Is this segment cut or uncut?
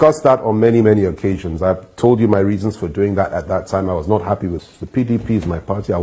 cut